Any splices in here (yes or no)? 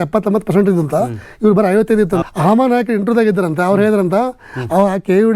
yes